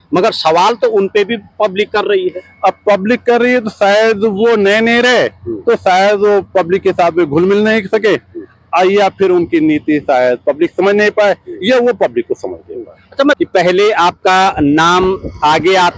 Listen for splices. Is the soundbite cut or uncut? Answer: cut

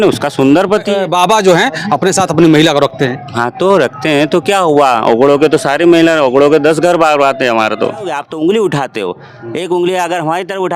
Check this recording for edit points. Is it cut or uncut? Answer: cut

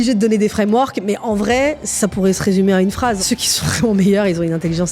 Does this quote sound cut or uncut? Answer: cut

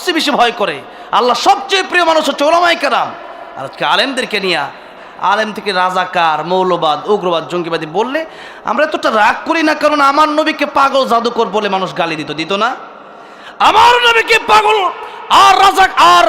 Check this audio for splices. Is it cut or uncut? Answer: cut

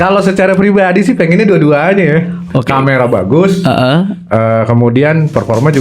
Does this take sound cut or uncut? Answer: uncut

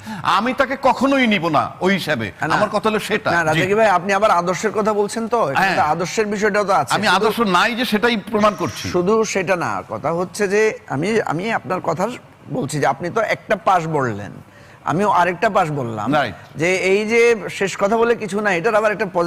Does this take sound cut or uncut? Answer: uncut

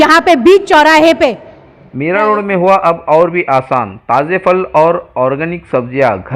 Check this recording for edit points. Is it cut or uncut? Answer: cut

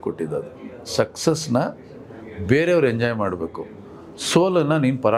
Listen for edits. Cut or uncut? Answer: uncut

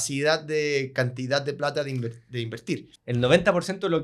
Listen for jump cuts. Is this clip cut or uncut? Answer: cut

